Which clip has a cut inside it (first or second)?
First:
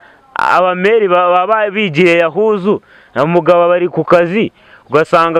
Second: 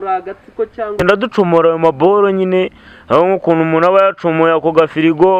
second